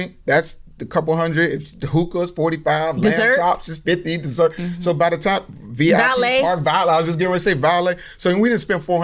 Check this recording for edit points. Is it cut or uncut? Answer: uncut